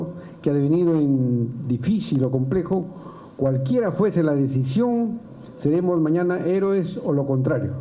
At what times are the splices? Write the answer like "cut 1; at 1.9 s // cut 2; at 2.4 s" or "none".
cut 1; at 5.2 s